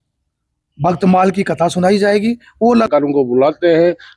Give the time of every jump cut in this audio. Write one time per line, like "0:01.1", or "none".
0:02.9